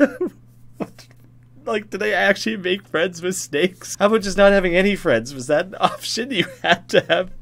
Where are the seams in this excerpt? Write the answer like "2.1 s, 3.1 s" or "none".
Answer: 3.8 s